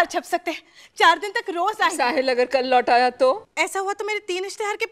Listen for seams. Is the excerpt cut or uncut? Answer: cut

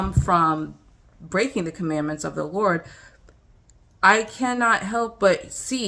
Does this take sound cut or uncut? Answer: uncut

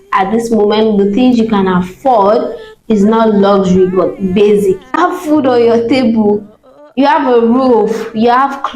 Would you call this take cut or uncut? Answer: cut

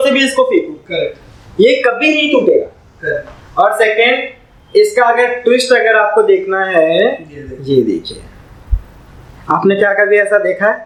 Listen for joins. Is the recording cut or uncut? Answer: uncut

